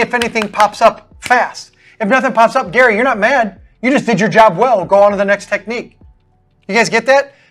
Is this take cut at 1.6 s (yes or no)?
no